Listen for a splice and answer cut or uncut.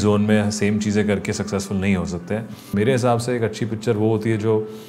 cut